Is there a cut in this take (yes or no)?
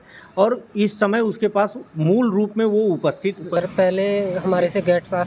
yes